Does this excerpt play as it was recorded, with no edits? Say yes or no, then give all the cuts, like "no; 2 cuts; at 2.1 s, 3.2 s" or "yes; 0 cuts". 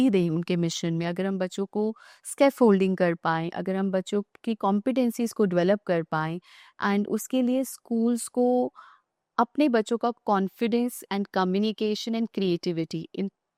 yes; 0 cuts